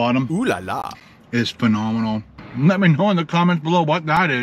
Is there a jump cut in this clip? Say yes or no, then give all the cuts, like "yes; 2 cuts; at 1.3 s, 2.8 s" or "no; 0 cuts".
yes; 2 cuts; at 1.0 s, 2.4 s